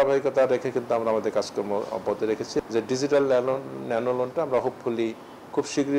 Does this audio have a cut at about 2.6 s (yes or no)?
yes